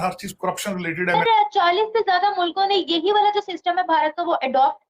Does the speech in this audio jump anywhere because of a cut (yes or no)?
yes